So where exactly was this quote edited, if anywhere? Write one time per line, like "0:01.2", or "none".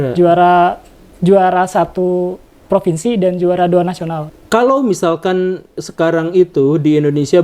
0:04.2